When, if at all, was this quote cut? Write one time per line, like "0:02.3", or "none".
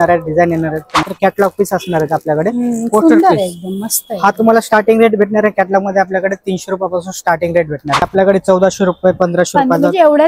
0:01.0
0:08.1